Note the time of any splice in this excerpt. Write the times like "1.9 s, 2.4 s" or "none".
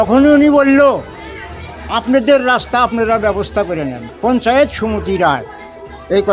3.9 s